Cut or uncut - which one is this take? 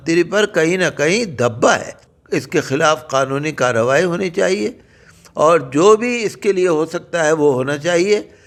uncut